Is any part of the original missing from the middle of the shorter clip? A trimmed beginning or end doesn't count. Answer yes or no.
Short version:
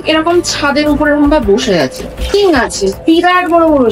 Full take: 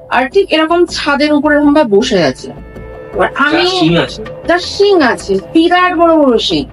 yes